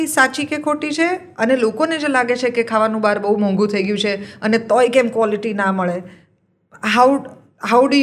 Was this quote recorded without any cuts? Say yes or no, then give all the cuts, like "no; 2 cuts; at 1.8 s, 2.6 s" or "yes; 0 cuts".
yes; 0 cuts